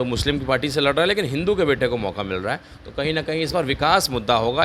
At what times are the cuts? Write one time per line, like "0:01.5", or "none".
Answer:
none